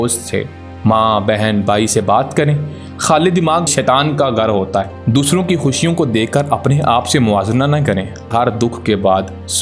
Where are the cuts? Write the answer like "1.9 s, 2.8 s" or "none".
3.7 s, 4.9 s, 8.3 s